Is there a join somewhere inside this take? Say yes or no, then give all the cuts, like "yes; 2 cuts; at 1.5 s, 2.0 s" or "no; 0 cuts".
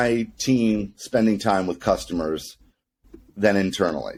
no; 0 cuts